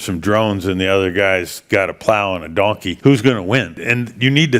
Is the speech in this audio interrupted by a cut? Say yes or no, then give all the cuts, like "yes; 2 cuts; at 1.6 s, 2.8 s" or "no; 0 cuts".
yes; 2 cuts; at 2.9 s, 3.8 s